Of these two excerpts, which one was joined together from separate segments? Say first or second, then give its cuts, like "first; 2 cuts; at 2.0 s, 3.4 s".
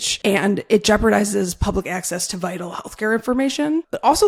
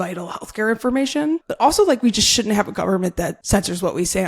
second; 1 cut; at 3.4 s